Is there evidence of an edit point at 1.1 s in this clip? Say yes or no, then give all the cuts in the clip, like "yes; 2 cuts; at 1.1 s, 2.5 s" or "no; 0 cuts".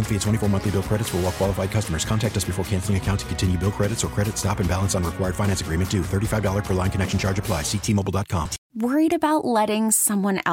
no; 1 cut; at 8.6 s